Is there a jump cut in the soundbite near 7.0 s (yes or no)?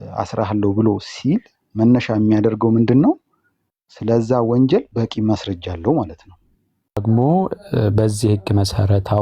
yes